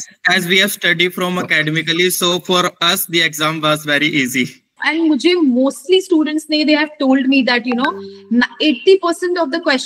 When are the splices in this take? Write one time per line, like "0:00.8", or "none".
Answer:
0:04.8

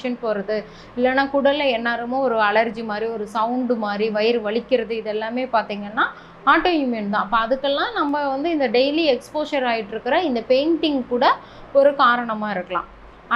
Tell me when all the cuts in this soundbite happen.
none

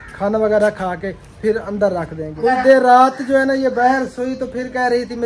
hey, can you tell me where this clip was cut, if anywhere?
0:02.2

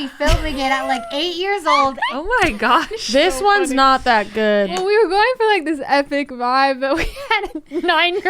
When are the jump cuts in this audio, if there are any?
0:02.0
0:04.7

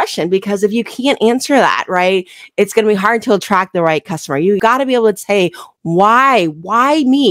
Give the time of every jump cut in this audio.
none

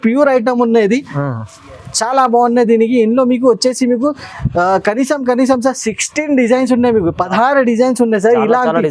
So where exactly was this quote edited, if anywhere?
none

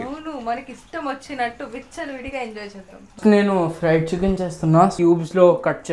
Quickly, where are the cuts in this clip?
0:03.2
0:04.9

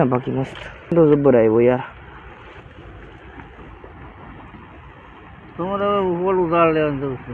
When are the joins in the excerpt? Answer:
0:00.9

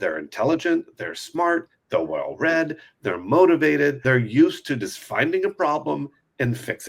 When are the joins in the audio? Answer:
0:04.0

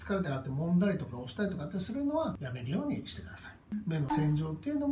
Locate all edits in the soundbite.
0:03.6

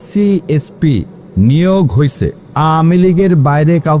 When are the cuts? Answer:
0:02.4

